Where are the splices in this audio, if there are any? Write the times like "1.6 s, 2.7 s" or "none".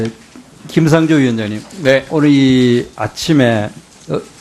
none